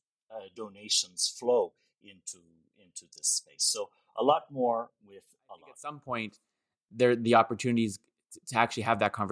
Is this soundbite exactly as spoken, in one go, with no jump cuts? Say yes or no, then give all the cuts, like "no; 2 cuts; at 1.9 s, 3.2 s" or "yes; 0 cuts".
no; 1 cut; at 5.8 s